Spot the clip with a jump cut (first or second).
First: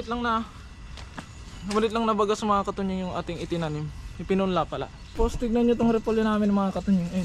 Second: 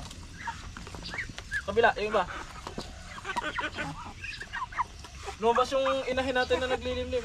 first